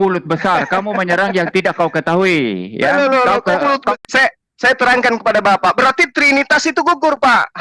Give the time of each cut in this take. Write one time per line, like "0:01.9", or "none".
0:04.0